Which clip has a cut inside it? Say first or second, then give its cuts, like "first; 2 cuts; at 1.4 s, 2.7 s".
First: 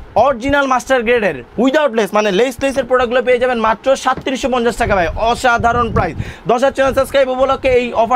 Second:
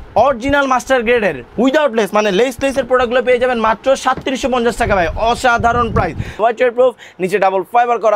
second; 1 cut; at 6.3 s